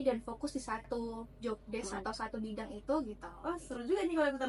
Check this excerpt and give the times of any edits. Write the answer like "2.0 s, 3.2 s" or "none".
3.3 s